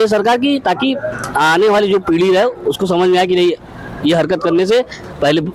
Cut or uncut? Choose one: uncut